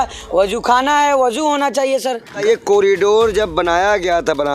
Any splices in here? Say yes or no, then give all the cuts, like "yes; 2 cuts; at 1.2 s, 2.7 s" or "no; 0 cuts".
yes; 1 cut; at 2.4 s